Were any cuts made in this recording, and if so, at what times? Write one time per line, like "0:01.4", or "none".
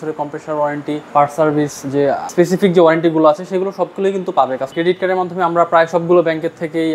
0:01.0
0:02.2
0:04.7